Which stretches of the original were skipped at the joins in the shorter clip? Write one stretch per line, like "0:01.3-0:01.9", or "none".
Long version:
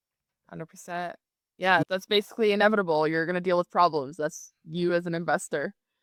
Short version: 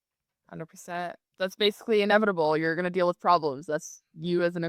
0:01.4-0:01.9